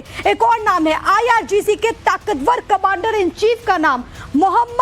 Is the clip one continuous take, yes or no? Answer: no